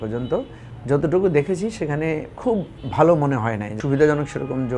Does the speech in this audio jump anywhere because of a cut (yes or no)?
yes